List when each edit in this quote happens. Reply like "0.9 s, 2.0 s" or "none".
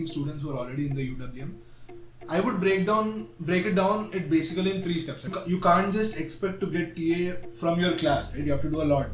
5.3 s